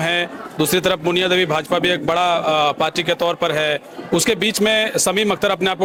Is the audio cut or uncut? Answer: uncut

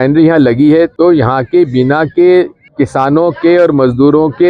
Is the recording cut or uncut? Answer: cut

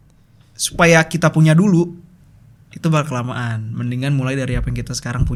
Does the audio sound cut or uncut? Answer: uncut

